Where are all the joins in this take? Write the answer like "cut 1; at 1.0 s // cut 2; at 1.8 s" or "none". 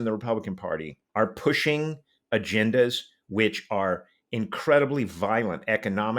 cut 1; at 1.0 s